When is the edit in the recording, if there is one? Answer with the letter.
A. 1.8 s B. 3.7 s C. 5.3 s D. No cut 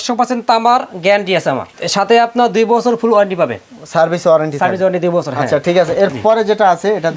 D